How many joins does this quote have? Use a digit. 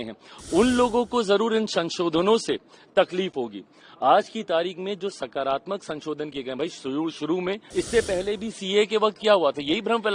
1